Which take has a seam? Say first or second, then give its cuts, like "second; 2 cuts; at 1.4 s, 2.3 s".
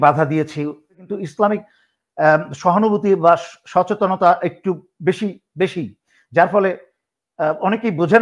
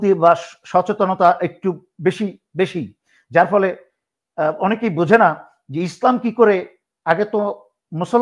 first; 1 cut; at 1.1 s